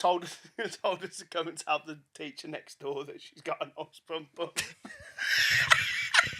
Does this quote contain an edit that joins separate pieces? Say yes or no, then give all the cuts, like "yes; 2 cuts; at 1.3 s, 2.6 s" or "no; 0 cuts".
no; 0 cuts